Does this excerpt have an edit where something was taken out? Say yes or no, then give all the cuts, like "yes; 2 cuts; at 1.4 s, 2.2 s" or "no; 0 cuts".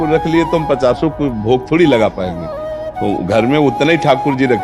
no; 0 cuts